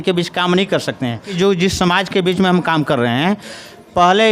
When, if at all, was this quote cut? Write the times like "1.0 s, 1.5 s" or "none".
1.3 s

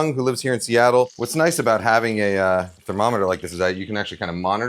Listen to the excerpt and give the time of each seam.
1.1 s, 2.8 s

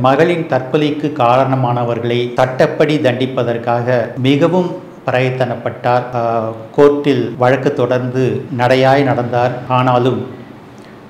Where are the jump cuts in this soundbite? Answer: 2.3 s, 4.1 s, 6.1 s, 7.3 s, 8.5 s, 9.6 s

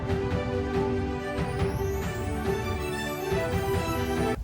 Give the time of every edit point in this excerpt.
2.8 s

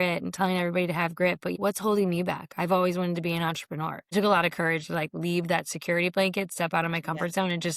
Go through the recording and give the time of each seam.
1.5 s, 4.0 s

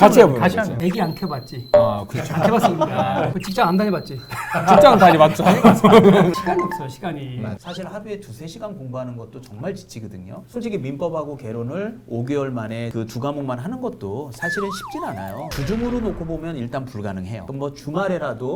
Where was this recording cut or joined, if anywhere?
none

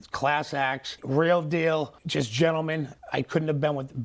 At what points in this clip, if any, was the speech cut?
none

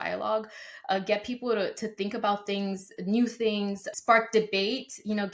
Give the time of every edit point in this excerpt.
3.8 s

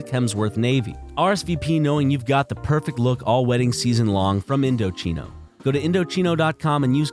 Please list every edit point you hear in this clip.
1.0 s

